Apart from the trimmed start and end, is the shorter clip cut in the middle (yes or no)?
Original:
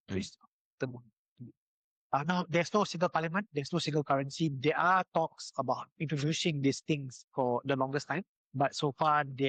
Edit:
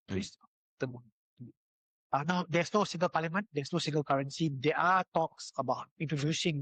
no